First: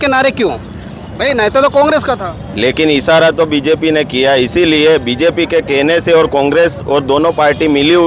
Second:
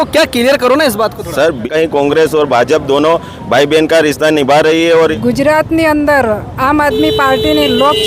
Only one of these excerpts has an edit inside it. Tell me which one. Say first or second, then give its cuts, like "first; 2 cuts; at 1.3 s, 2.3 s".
second; 2 cuts; at 1.7 s, 5.1 s